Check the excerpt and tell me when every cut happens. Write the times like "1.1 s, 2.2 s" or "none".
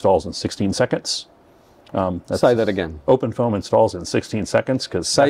none